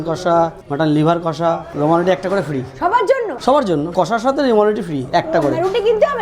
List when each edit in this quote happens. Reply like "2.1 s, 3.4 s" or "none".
none